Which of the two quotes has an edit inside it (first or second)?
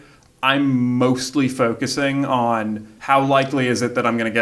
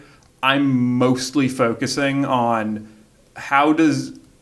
first